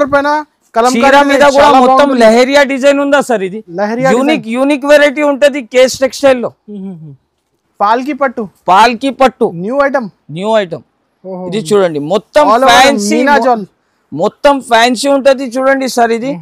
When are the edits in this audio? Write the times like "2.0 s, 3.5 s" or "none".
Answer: 7.6 s